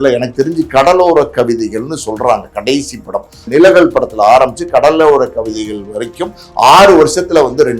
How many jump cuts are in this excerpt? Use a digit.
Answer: 1